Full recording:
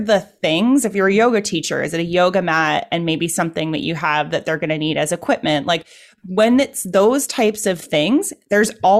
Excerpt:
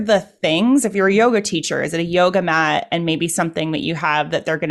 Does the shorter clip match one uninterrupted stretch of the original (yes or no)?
yes